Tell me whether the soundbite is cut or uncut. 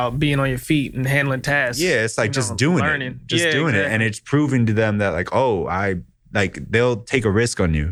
uncut